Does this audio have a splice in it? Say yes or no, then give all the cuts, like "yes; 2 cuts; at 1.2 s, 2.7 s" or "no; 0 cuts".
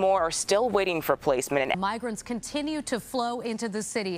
yes; 1 cut; at 1.8 s